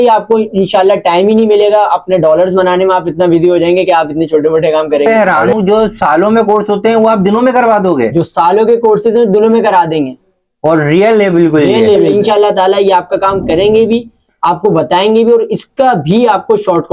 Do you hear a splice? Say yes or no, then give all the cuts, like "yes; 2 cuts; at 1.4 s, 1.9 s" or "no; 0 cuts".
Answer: yes; 2 cuts; at 5.1 s, 12.1 s